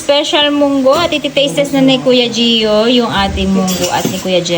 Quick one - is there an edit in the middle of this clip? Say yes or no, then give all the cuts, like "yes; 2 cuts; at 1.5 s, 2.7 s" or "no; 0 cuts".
no; 0 cuts